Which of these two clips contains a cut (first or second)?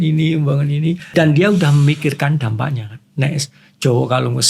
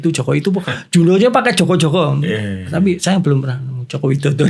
first